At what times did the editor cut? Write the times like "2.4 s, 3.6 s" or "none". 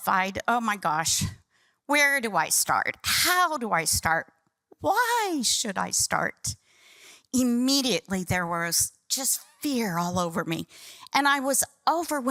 none